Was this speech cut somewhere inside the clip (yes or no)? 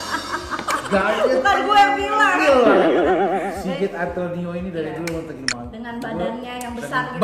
no